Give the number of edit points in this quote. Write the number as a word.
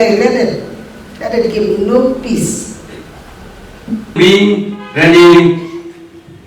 one